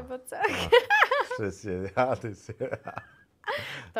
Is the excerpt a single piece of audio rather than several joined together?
yes; 0 cuts

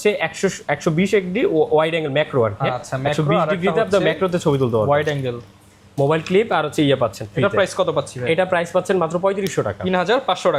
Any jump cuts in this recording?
no; 0 cuts

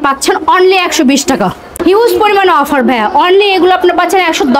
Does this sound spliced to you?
yes; 1 cut; at 1.6 s

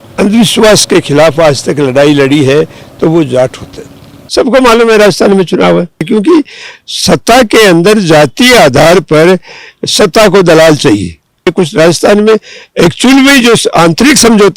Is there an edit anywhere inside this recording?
yes; 3 cuts; at 4.2 s, 6.1 s, 11.5 s

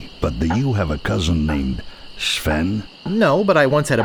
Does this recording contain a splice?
no; 0 cuts

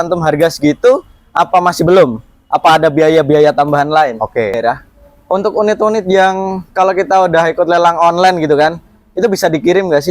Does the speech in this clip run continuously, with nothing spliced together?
no; 1 cut; at 4.6 s

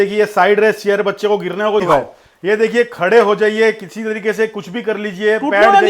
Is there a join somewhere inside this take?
yes; 1 cut; at 1.8 s

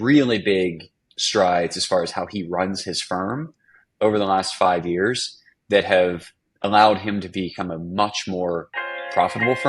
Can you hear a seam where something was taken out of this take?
no; 0 cuts

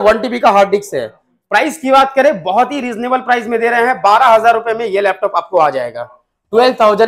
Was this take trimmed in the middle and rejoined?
no; 0 cuts

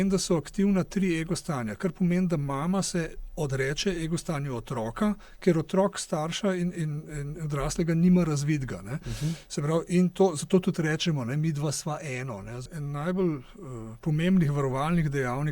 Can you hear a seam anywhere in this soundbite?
yes; 1 cut; at 12.6 s

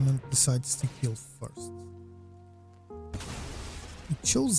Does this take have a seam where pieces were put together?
yes; 2 cuts; at 1.5 s, 3.1 s

